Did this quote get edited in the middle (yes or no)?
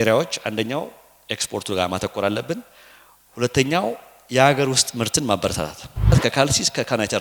yes